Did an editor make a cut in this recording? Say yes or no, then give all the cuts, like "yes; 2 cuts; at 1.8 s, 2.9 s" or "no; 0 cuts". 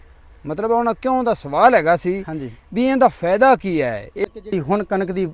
yes; 1 cut; at 4.3 s